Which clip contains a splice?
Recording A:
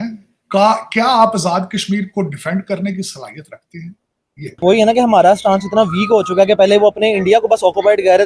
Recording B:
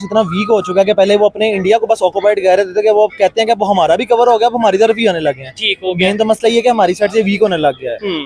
A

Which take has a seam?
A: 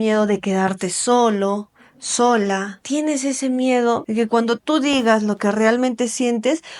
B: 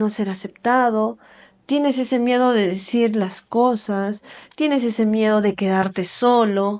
A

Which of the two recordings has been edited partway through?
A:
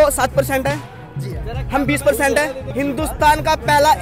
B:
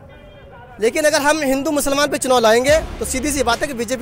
A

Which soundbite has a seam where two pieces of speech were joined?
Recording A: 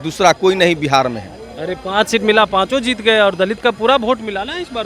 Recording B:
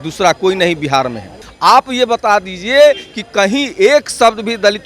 B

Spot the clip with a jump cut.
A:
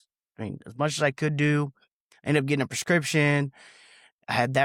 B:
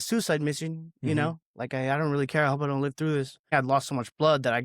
B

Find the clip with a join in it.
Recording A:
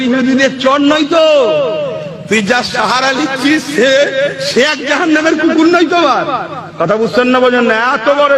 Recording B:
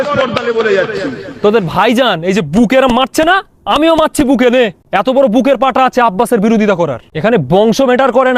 B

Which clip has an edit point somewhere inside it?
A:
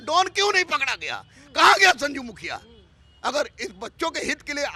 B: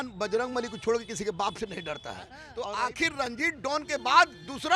B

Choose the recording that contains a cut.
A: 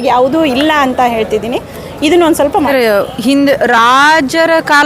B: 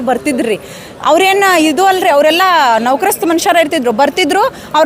A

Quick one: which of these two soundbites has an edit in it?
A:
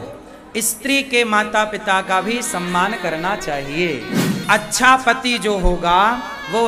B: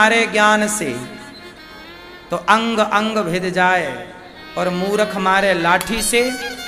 A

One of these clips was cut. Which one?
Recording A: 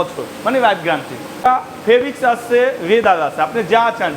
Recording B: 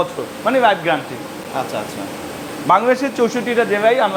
A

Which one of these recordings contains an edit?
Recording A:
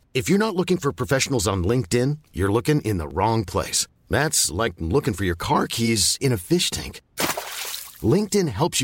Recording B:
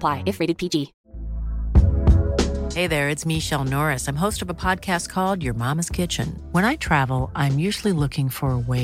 B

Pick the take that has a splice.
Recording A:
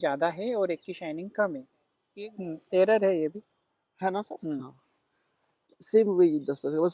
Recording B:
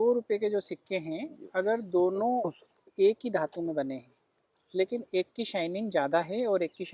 A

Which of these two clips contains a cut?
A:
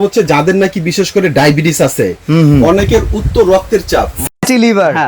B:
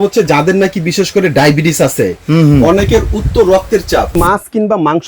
B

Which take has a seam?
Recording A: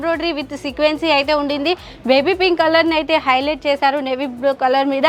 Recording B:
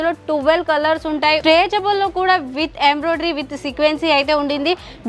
B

